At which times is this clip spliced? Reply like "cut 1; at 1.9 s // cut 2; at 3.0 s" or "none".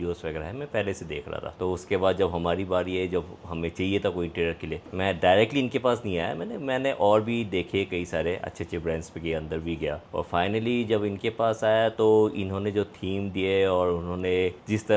none